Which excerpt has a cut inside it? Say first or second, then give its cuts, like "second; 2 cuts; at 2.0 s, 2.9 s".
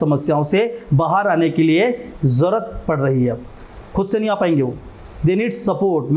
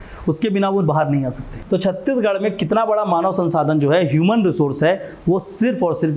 second; 1 cut; at 1.6 s